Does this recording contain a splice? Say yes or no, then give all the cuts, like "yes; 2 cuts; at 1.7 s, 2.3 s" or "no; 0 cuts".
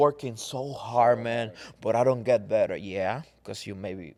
no; 0 cuts